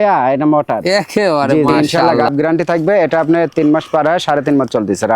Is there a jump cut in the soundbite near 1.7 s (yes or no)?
yes